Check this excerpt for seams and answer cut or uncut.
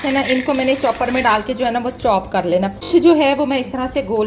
cut